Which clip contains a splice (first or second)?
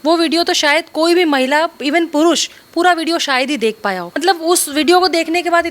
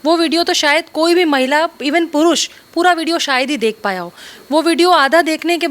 first